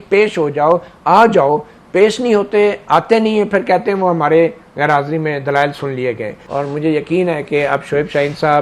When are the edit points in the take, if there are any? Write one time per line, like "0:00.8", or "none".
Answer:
0:06.3